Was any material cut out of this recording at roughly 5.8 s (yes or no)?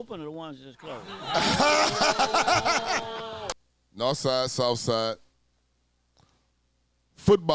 no